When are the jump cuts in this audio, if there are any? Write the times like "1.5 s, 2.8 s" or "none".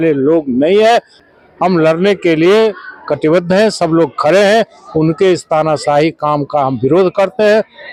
none